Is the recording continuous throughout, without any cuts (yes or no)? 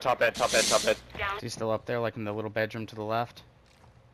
no